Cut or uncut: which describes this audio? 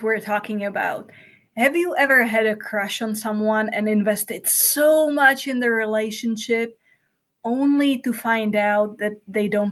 uncut